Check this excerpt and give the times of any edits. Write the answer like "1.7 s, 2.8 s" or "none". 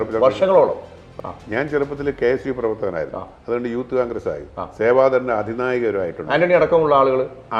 1.1 s